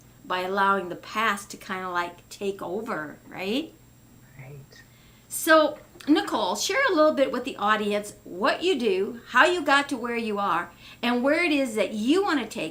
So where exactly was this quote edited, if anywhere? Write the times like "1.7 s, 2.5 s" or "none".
none